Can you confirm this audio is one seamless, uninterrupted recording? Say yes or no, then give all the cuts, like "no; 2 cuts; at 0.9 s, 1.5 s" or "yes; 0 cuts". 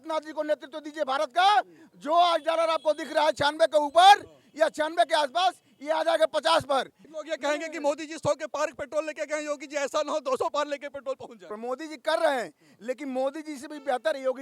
no; 2 cuts; at 7.0 s, 11.5 s